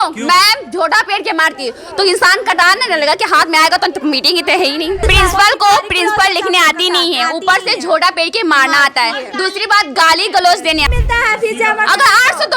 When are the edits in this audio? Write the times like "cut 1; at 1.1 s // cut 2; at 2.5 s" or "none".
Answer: cut 1; at 5.0 s // cut 2; at 10.9 s